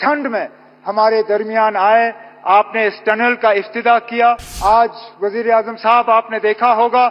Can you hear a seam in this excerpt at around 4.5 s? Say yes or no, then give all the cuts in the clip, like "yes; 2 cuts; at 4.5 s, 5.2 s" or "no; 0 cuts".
yes; 1 cut; at 4.5 s